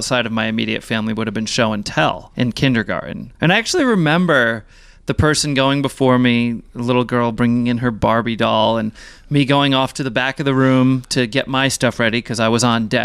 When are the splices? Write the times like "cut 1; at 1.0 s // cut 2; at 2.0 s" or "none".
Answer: cut 1; at 2.3 s // cut 2; at 3.2 s

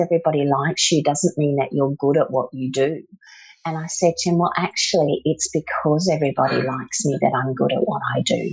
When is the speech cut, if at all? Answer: none

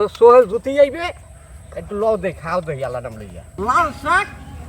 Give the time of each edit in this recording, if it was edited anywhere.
cut 1; at 3.6 s

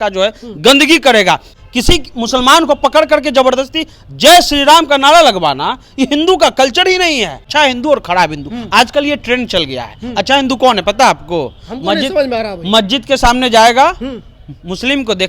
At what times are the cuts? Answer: cut 1; at 1.5 s // cut 2; at 7.4 s

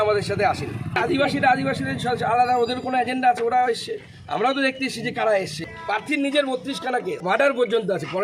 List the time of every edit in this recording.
cut 1; at 1.0 s // cut 2; at 5.7 s // cut 3; at 7.2 s

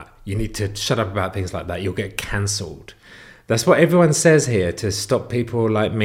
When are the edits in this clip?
none

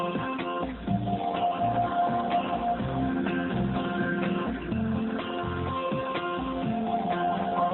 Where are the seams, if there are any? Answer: cut 1; at 3.2 s

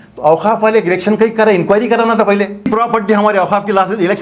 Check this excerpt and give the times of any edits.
cut 1; at 2.7 s

